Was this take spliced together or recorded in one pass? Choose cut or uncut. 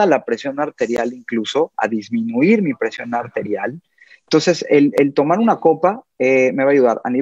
uncut